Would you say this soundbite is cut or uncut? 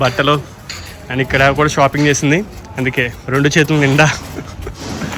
cut